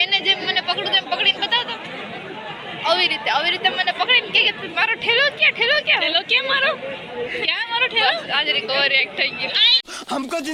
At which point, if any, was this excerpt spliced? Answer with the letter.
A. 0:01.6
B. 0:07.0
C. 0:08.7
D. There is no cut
D